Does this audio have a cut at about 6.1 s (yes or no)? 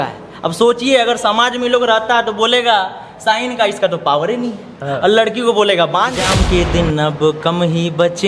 yes